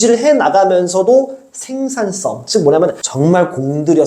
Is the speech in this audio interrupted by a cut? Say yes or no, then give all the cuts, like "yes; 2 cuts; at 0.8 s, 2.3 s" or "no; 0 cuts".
yes; 1 cut; at 3.0 s